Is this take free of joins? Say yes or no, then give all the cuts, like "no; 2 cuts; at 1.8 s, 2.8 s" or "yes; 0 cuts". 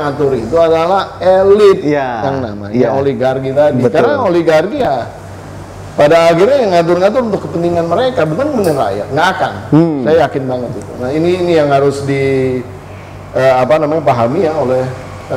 yes; 0 cuts